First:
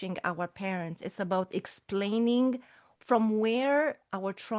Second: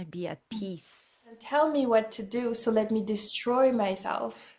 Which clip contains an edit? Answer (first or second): second